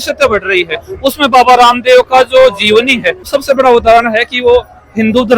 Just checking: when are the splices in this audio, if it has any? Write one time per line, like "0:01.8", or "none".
0:03.3